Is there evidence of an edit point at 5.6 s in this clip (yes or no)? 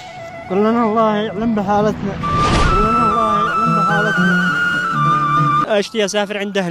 yes